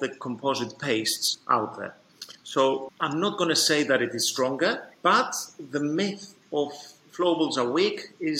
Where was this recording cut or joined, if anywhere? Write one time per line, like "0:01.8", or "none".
0:02.9